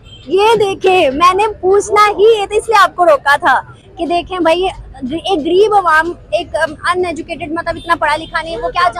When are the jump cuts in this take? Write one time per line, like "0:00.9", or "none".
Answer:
none